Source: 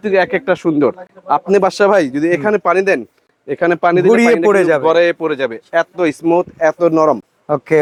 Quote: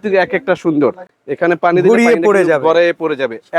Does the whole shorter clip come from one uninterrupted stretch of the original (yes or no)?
no